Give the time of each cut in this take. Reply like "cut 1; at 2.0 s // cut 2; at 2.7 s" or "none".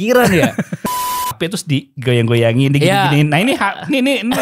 cut 1; at 1.0 s